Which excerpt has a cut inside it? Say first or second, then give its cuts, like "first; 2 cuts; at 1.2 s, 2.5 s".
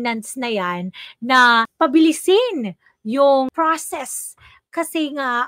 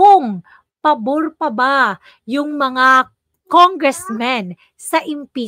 first; 2 cuts; at 1.7 s, 3.5 s